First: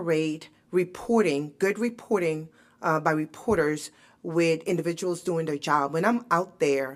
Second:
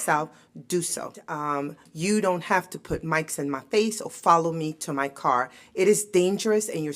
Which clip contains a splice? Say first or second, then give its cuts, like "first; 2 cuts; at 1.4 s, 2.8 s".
second; 1 cut; at 1.3 s